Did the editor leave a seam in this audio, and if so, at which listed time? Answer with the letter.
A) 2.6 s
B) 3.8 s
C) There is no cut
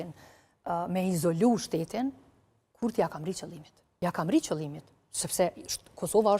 B